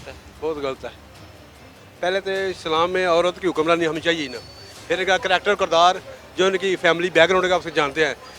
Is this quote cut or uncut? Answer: uncut